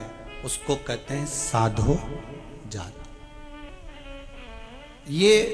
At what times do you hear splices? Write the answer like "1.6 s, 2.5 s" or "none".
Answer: 3.7 s